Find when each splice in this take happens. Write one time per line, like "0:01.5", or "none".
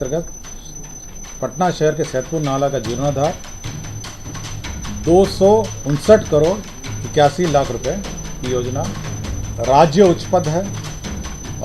0:09.5